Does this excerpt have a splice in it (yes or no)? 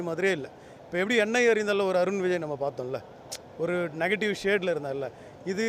no